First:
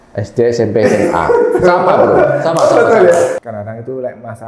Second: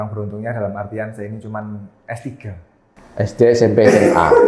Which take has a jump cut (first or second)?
first